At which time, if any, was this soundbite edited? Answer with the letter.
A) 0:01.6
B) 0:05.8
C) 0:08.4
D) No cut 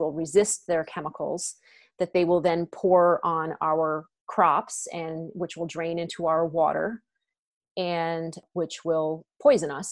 C